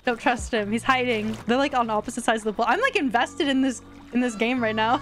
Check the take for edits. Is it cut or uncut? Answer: cut